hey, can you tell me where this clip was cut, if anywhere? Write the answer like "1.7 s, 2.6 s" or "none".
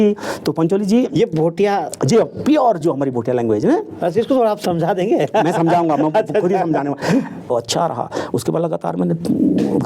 7.5 s